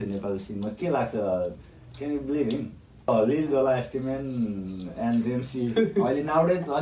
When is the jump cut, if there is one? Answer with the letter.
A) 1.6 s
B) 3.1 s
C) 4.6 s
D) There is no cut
B